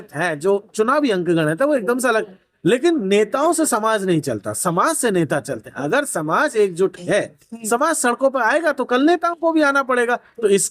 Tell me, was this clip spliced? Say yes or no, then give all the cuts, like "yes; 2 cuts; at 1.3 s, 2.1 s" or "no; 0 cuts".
no; 0 cuts